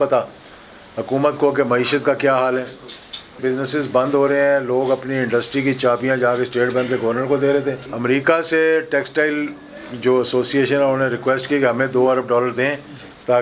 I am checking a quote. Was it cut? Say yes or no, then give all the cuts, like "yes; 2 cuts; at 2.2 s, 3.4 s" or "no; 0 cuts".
yes; 2 cuts; at 3.4 s, 7.9 s